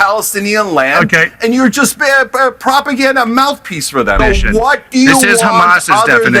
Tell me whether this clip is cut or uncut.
cut